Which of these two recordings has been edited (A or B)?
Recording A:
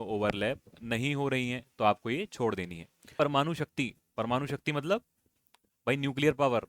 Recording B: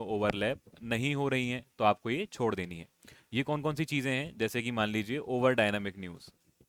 A